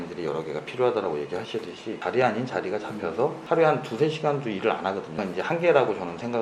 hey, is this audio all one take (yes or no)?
no